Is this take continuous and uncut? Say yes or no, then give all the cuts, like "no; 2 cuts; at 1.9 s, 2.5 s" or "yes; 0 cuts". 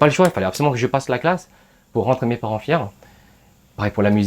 yes; 0 cuts